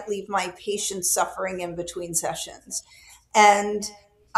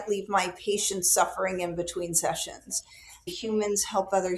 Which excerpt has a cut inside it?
second; 1 cut; at 3.3 s

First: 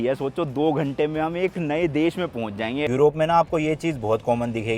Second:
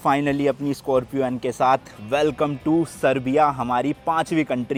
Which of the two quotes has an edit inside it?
first; 1 cut; at 2.9 s

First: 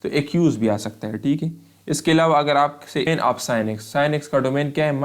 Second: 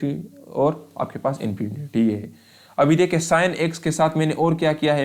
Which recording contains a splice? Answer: first; 1 cut; at 3.1 s

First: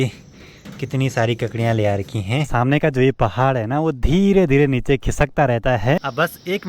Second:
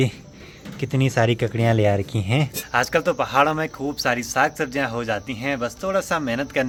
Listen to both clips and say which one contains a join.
first; 2 cuts; at 2.5 s, 6.0 s

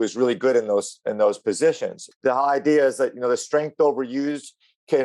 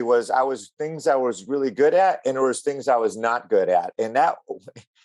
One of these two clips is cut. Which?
first; 1 cut; at 2.0 s

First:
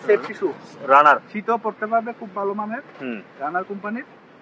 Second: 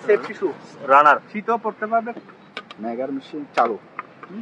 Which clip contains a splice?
second; 1 cut; at 2.2 s

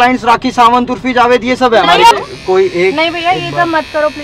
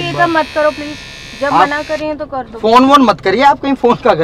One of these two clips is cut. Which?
first; 1 cut; at 2.3 s

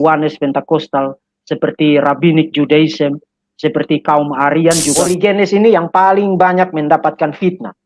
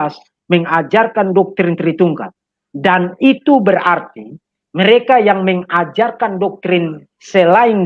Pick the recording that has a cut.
first; 1 cut; at 4.9 s

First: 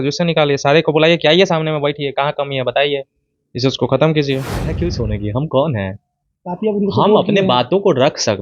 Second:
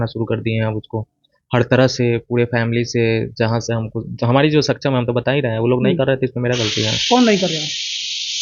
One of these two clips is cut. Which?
first; 1 cut; at 4.7 s

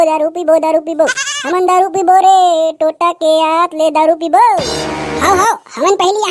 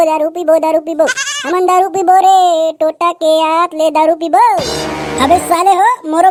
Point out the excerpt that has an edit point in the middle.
first; 1 cut; at 5.0 s

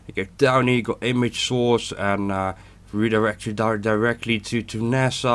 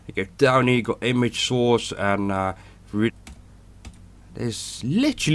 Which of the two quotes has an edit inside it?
first; 1 cut; at 3.1 s

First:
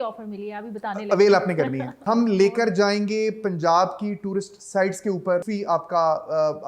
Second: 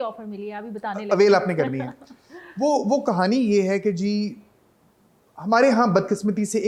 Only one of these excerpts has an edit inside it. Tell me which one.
first; 2 cuts; at 1.9 s, 5.5 s

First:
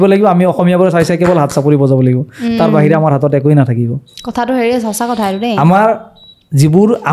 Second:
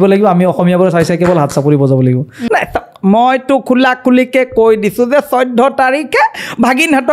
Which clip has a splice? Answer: second; 1 cut; at 2.3 s

